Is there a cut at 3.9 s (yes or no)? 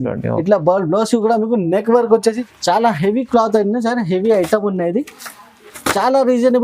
no